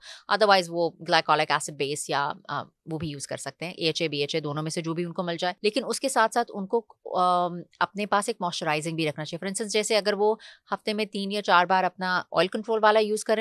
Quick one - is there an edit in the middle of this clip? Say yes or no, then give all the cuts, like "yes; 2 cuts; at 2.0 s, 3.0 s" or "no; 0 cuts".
yes; 1 cut; at 5.6 s